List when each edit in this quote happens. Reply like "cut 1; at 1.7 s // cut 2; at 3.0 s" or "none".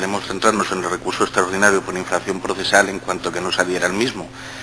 cut 1; at 2.4 s